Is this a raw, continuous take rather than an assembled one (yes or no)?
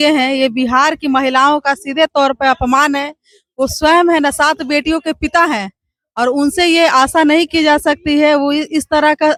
yes